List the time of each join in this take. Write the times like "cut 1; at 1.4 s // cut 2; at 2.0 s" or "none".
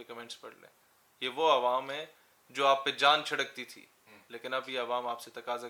none

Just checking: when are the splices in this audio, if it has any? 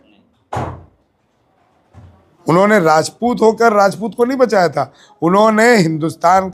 none

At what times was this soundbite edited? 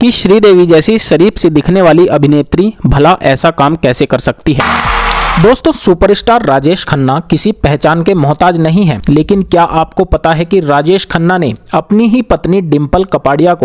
cut 1; at 4.6 s // cut 2; at 9.0 s

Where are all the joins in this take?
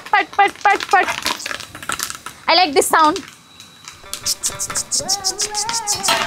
none

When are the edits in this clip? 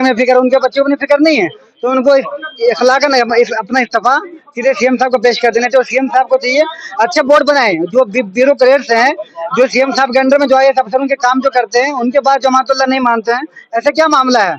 none

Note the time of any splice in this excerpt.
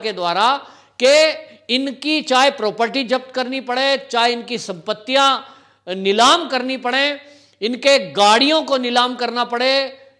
none

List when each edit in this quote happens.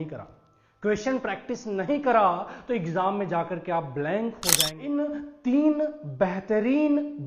cut 1; at 4.8 s

